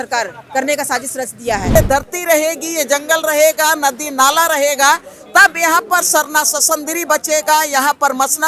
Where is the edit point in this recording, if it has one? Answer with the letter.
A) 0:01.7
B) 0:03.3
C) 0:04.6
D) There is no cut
A